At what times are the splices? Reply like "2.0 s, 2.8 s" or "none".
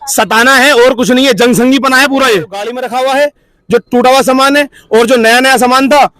2.8 s